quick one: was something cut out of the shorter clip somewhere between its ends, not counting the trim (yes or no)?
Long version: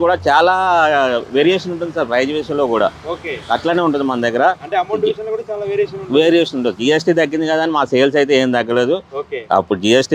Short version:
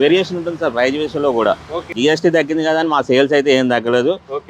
yes